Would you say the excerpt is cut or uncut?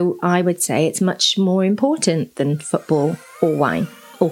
cut